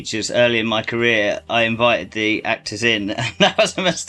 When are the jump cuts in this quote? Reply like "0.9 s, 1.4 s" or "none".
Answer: none